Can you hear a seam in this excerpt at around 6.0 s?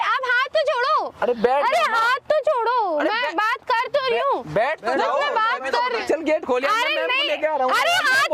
yes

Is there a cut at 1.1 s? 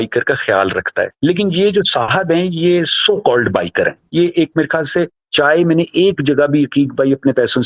yes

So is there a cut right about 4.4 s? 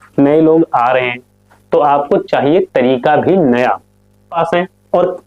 yes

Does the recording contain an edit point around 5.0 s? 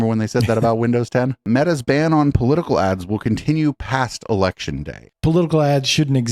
yes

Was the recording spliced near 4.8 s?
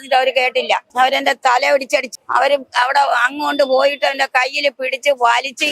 no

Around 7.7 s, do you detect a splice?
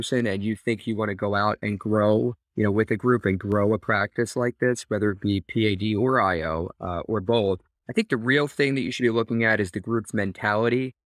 yes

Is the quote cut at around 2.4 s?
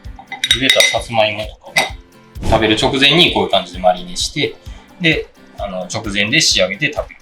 yes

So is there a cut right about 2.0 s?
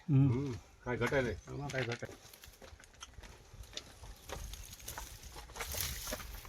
yes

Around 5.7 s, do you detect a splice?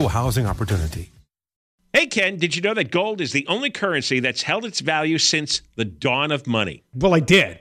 no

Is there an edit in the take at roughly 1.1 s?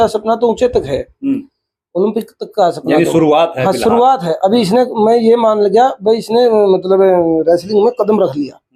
no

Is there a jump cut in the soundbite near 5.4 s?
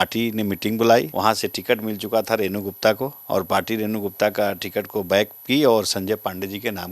no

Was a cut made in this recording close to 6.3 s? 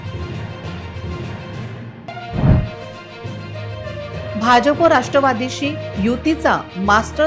no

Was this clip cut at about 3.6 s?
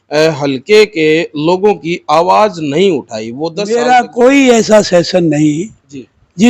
yes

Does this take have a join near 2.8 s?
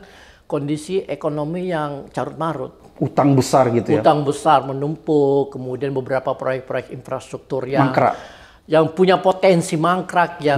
no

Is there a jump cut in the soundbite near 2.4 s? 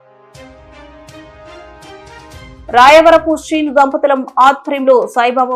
yes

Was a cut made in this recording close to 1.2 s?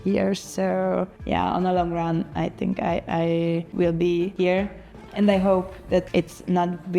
yes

